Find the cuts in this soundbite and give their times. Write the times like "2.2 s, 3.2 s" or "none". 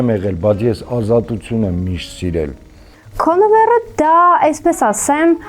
2.9 s